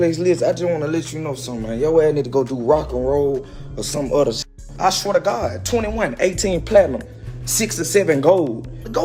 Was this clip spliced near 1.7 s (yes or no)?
no